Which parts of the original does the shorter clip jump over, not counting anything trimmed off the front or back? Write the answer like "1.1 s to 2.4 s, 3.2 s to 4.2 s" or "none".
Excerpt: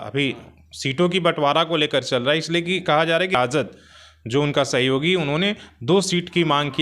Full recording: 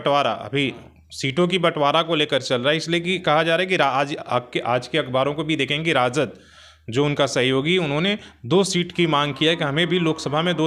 3.7 s to 6.0 s